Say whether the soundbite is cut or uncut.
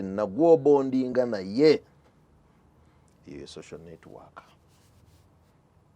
uncut